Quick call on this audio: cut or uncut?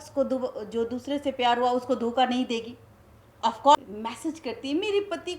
cut